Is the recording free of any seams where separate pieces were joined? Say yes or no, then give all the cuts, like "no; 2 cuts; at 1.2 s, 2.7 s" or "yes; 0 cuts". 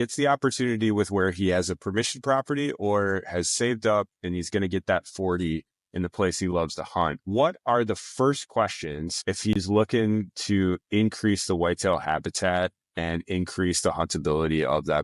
yes; 0 cuts